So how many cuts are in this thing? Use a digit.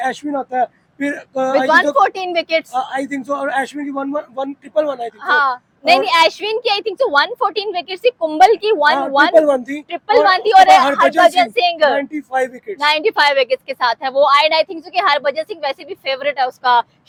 0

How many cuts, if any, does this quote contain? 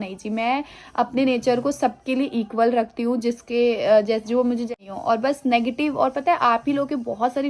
1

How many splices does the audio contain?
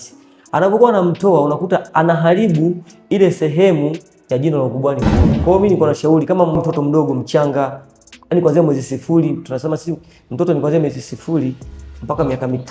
2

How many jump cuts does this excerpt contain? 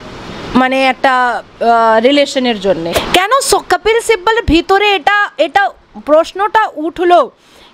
1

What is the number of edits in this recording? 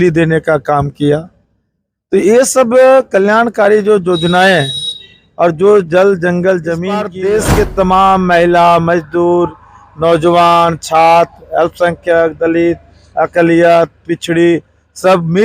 1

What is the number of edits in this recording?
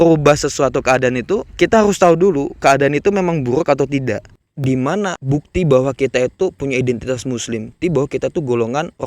4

